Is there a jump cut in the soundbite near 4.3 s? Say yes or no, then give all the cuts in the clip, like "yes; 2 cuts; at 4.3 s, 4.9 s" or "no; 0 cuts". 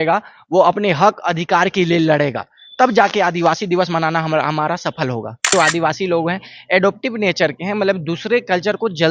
no; 1 cut; at 5.5 s